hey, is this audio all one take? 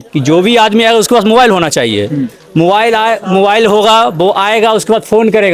yes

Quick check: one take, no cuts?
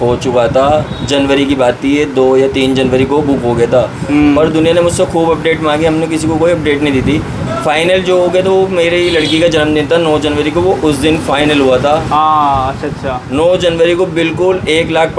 yes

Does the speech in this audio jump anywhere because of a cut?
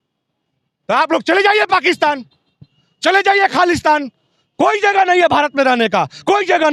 no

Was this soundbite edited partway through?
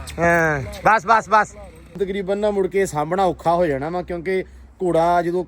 yes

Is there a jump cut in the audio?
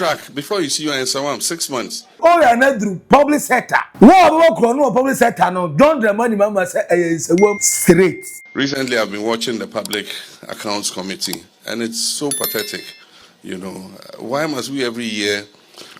yes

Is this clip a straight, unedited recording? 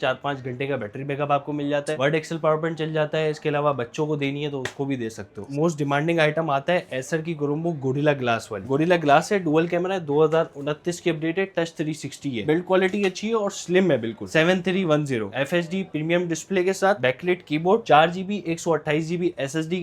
no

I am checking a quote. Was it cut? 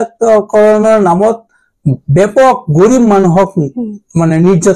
no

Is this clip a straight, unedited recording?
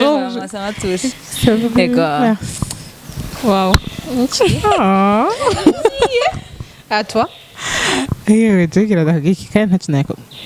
yes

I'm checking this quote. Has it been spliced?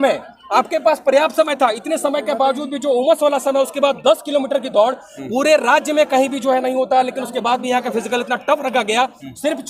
no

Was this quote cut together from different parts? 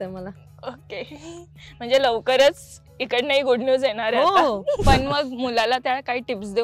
yes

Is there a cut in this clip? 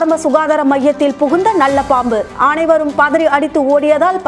no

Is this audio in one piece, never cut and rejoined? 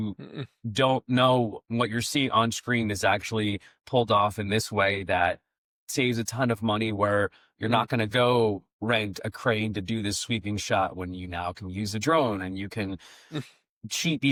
yes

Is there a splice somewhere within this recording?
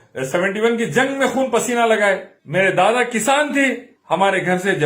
yes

